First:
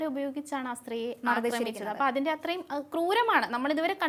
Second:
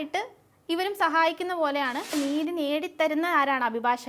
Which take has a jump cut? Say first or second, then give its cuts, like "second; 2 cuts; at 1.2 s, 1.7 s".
second; 1 cut; at 2.1 s